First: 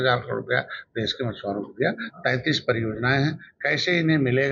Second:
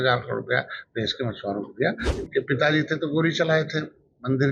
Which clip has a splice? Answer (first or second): second